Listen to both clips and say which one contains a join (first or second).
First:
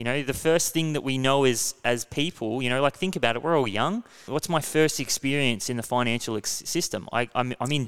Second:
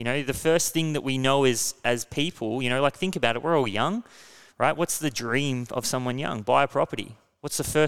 first